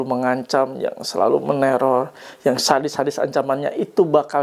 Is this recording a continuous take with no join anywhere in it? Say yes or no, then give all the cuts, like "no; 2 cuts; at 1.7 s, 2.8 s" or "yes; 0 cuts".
yes; 0 cuts